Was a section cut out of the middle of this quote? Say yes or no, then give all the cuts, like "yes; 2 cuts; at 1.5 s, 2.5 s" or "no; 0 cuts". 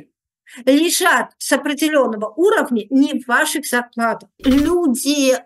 yes; 1 cut; at 4.3 s